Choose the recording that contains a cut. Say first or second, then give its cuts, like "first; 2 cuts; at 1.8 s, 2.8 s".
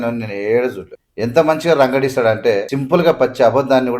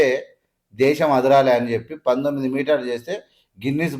first; 2 cuts; at 0.9 s, 2.7 s